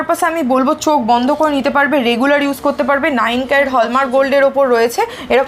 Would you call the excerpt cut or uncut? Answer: uncut